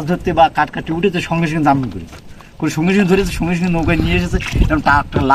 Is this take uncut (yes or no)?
yes